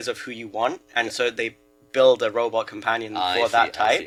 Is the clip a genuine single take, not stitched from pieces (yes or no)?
yes